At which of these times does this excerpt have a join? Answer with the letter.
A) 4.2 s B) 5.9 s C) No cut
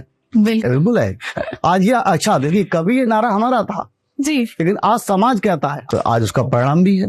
B